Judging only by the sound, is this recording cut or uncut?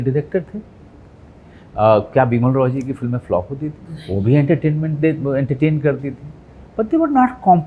uncut